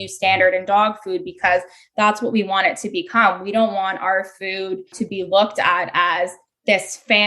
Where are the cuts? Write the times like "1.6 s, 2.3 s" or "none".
4.9 s